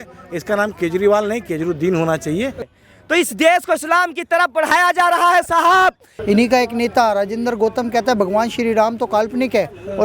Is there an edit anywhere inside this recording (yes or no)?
yes